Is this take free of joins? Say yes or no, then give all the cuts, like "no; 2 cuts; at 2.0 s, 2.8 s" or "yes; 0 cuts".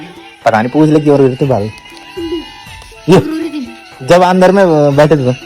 yes; 0 cuts